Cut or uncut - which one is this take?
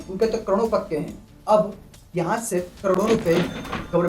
cut